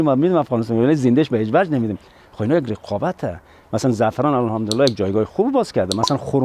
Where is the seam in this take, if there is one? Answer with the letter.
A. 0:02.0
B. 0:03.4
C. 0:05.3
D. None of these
D